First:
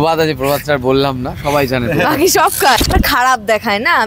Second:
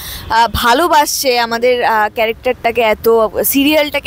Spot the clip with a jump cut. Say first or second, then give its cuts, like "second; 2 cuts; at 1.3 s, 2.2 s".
first; 1 cut; at 2.8 s